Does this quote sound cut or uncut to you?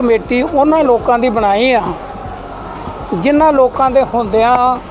uncut